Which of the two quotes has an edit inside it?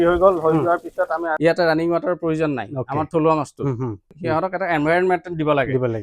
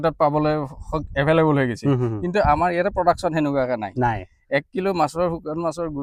first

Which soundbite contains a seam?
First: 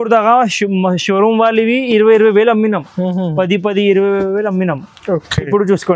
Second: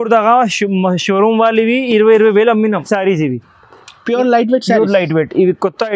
second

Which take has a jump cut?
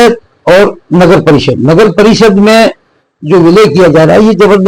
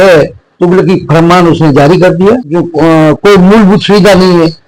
second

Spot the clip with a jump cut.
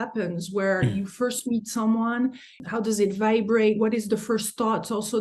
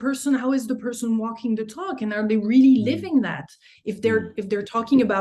first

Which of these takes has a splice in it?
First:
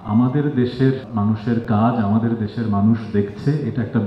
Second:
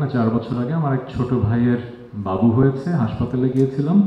first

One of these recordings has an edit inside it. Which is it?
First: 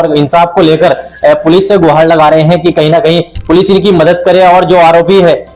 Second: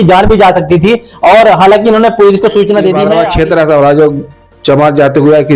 second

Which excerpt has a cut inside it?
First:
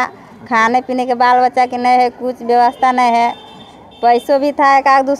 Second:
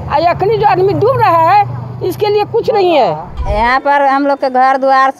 second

